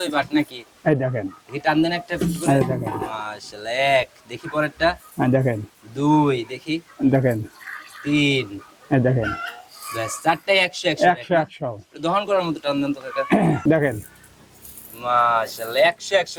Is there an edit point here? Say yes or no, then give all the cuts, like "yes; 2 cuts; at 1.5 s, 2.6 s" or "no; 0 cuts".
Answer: no; 0 cuts